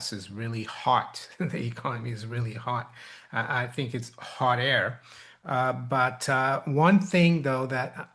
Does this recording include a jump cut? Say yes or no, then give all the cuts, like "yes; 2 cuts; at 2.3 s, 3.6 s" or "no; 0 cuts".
no; 0 cuts